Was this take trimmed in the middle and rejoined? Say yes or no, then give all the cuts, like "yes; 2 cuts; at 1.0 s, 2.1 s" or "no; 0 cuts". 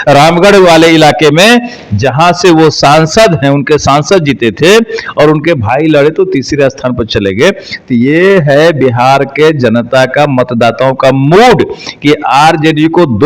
no; 0 cuts